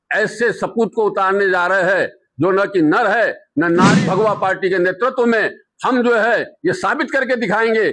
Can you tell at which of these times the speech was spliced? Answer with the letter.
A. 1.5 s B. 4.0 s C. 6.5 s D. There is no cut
B